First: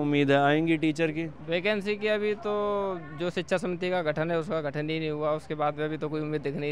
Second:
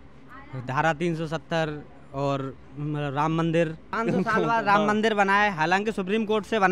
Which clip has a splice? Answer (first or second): second